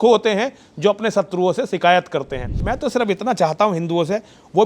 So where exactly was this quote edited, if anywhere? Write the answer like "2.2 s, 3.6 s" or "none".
2.6 s